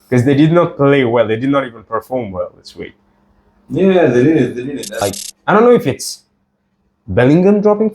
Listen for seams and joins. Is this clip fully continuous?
no; 1 cut; at 5.2 s

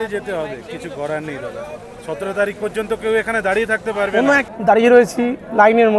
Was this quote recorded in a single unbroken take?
no; 1 cut; at 4.4 s

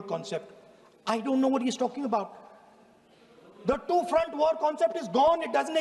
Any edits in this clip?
no; 0 cuts

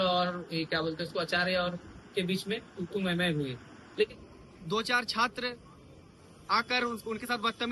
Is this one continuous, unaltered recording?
no; 1 cut; at 4.1 s

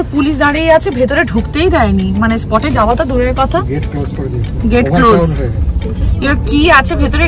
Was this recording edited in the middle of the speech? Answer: no; 0 cuts

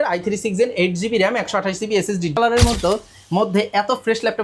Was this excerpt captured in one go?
no; 1 cut; at 2.4 s

